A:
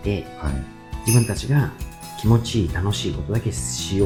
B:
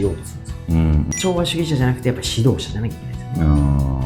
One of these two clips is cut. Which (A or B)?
B